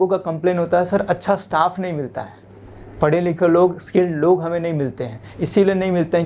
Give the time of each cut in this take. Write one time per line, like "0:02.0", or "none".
none